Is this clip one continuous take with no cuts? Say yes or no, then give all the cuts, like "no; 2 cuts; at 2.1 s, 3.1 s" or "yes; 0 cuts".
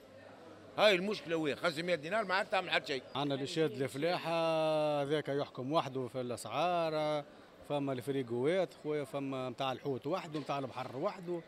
no; 1 cut; at 3.1 s